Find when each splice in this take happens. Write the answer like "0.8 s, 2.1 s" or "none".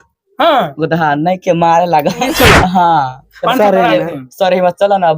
2.3 s